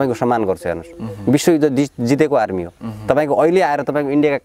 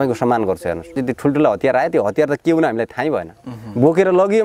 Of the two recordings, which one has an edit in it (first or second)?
second